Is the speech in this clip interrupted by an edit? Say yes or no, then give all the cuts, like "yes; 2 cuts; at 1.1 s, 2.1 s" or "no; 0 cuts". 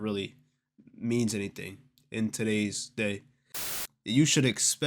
yes; 1 cut; at 3.7 s